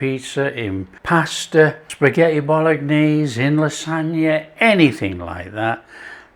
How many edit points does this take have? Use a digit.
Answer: 2